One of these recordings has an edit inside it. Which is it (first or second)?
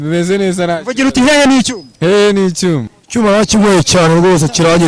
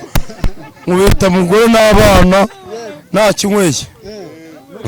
first